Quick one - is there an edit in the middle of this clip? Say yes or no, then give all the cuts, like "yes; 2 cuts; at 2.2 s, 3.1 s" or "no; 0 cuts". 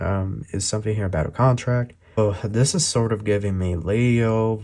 yes; 1 cut; at 2.2 s